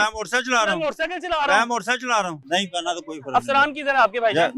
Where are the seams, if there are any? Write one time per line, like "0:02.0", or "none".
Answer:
0:02.4